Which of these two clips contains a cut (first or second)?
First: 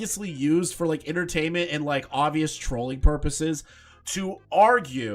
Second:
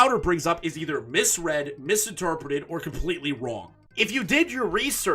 second